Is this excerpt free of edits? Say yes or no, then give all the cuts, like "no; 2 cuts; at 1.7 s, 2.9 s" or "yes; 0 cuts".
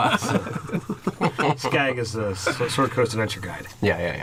yes; 0 cuts